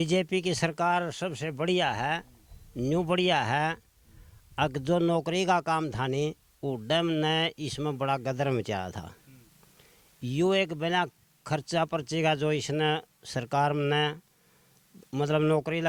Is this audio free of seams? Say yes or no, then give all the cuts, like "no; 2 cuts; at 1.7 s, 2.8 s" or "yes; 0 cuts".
yes; 0 cuts